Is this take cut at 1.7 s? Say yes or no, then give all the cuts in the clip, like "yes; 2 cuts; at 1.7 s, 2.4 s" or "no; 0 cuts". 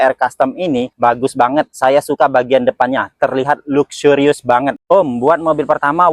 no; 1 cut; at 4.8 s